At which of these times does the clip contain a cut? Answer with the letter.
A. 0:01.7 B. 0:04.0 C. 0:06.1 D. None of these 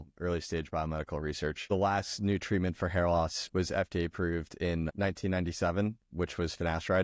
A